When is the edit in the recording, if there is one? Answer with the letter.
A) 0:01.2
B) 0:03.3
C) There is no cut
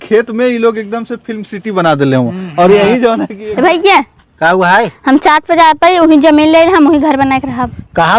B